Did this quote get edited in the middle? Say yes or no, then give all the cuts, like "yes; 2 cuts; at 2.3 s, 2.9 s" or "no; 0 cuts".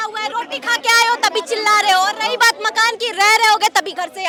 no; 0 cuts